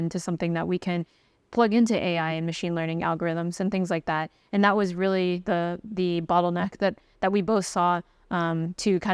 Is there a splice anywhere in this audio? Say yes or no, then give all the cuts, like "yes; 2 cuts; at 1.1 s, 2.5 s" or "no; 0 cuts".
no; 0 cuts